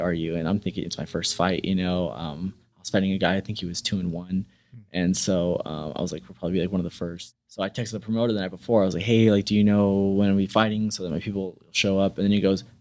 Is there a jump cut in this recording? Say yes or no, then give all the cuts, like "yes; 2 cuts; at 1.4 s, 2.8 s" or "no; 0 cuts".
yes; 1 cut; at 7.2 s